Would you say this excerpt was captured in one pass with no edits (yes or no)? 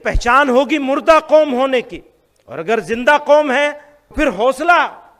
no